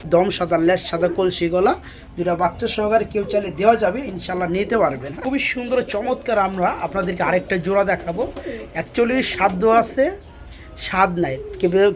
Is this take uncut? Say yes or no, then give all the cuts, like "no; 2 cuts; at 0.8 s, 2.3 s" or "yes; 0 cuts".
no; 1 cut; at 5.2 s